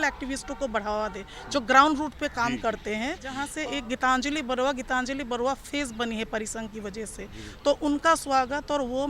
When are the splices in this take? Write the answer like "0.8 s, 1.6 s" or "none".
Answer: 3.5 s